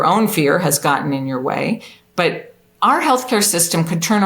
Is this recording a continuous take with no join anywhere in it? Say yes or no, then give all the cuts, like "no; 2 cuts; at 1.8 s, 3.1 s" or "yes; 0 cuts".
yes; 0 cuts